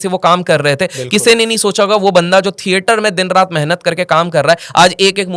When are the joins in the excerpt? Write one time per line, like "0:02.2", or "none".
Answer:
none